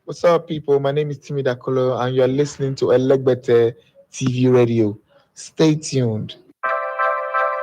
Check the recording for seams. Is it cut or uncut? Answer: cut